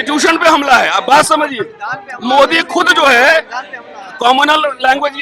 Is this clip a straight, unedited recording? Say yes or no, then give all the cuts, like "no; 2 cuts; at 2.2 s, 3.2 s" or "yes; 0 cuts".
yes; 0 cuts